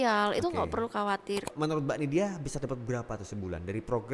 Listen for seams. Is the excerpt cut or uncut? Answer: cut